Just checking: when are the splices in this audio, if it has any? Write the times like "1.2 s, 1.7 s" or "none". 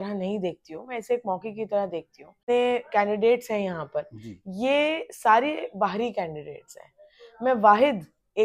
2.3 s

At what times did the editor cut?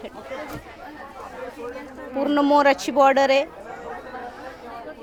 none

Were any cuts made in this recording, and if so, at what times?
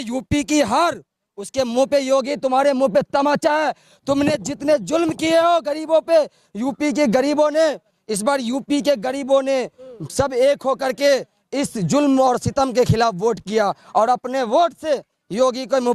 none

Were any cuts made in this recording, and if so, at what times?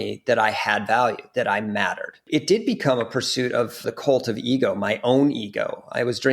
2.2 s, 3.8 s

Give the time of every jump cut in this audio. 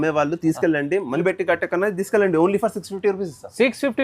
1.2 s

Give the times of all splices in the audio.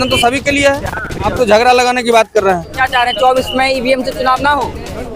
1.3 s, 2.7 s

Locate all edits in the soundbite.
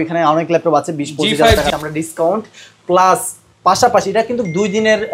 1.7 s

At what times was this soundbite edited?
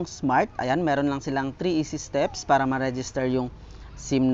none

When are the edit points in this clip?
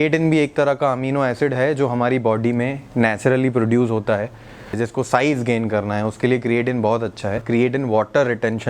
4.7 s, 7.4 s

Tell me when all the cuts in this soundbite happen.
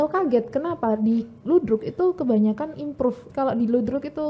3.2 s

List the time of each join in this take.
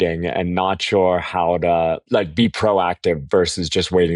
none

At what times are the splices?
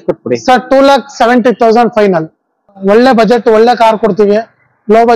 2.7 s

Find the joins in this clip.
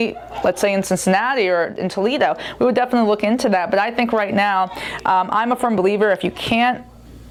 none

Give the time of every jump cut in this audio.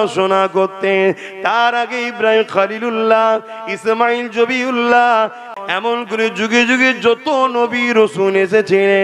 5.5 s

